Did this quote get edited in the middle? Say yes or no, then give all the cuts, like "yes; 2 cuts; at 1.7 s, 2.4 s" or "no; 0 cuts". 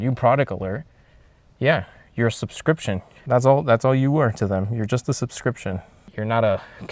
yes; 2 cuts; at 3.1 s, 6.0 s